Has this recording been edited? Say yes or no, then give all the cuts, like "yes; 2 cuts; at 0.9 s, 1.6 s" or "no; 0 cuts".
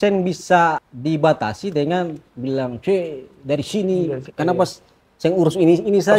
yes; 1 cut; at 0.9 s